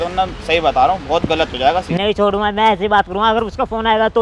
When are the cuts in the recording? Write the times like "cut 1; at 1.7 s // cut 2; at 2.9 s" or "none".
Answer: none